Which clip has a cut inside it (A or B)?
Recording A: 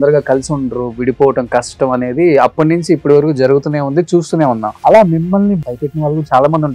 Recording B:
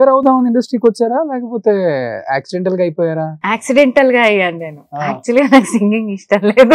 A